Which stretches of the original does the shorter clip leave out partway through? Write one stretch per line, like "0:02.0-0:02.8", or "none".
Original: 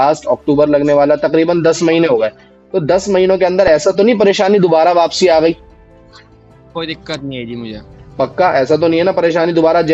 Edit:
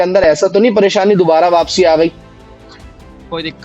none